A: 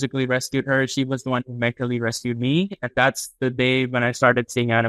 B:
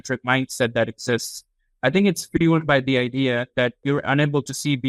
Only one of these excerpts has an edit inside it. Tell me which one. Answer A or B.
B